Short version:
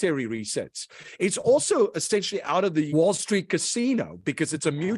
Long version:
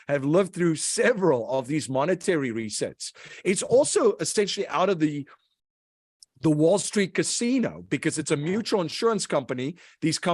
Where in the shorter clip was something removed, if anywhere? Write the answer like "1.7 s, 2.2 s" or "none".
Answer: 2.9 s